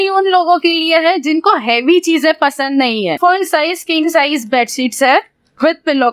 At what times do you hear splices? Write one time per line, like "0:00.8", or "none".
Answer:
0:03.1